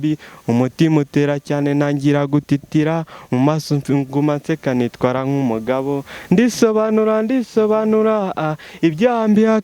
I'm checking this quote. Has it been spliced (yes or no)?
no